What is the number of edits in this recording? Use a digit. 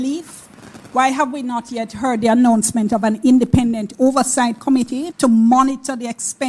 1